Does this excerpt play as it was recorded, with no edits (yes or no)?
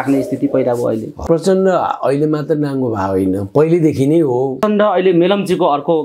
no